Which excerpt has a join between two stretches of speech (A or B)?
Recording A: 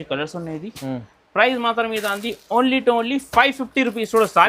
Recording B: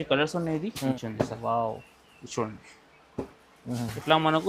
B